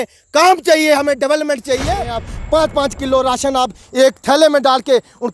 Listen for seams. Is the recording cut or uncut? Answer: cut